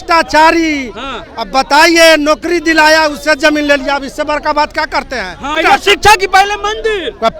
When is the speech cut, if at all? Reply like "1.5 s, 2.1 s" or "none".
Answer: 5.6 s

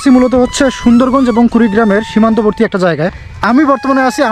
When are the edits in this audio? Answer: 3.2 s

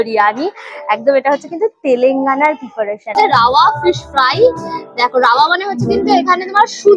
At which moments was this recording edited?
3.1 s

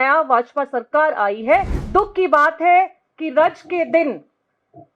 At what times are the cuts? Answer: 1.8 s

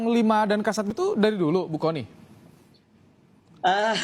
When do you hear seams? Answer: 0.9 s

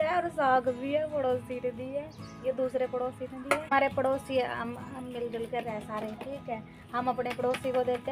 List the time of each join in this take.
3.7 s

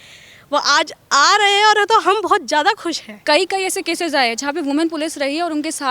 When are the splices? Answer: 3.2 s

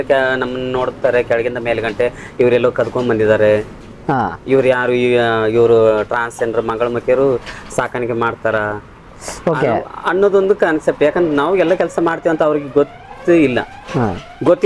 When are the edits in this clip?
none

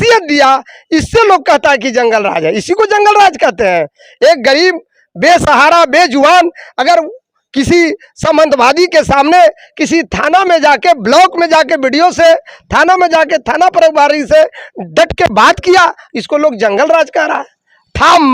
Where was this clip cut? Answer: none

